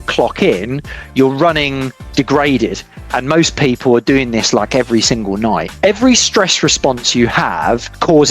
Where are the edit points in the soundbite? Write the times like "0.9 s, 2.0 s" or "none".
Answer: 5.7 s